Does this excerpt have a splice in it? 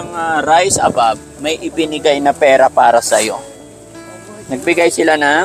no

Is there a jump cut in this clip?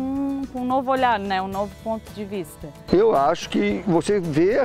yes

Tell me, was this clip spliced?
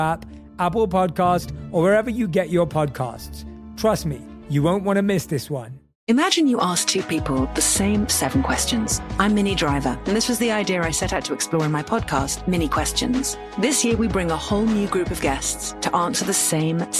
yes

